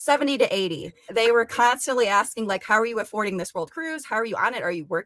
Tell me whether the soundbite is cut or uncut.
cut